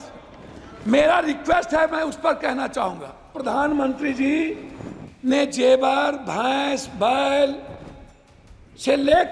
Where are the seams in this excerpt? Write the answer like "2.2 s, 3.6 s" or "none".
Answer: 3.4 s